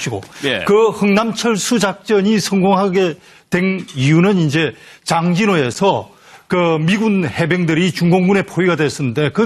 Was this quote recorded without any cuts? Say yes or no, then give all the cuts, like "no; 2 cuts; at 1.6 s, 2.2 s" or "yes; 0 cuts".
no; 1 cut; at 1.6 s